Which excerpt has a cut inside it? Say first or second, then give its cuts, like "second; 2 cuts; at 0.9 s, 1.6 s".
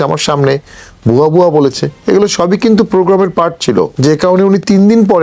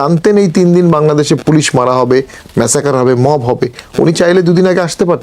first; 1 cut; at 3.9 s